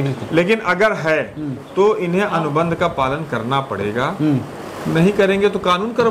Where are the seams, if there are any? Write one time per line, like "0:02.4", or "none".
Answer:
none